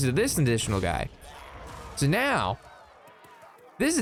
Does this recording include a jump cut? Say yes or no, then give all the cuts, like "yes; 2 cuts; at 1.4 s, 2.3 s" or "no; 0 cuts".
no; 0 cuts